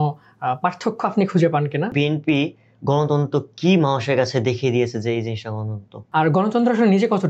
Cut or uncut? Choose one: cut